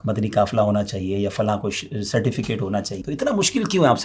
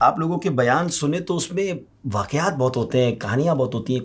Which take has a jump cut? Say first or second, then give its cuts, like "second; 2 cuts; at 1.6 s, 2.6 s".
first; 1 cut; at 3.0 s